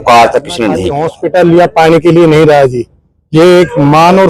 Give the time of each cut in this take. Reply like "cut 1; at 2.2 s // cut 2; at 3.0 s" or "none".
cut 1; at 1.0 s